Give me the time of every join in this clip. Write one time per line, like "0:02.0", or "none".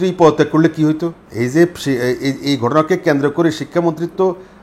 0:01.2